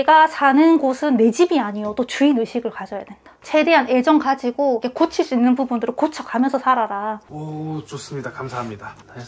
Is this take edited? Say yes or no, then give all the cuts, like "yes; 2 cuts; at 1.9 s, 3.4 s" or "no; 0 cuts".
no; 0 cuts